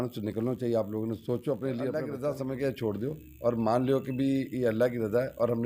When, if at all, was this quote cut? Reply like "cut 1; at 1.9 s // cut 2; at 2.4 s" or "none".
cut 1; at 2.1 s